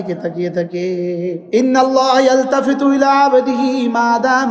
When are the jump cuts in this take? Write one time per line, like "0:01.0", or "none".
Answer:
0:01.4